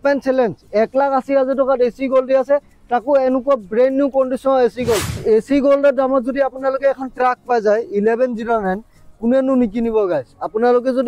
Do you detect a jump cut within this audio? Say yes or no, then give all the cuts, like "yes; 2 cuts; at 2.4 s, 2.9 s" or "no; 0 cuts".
yes; 1 cut; at 5.2 s